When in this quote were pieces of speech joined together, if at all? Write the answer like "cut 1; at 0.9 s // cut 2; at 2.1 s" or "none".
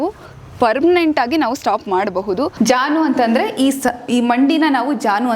cut 1; at 2.5 s